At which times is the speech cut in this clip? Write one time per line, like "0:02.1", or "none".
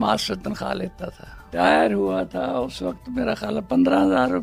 0:01.5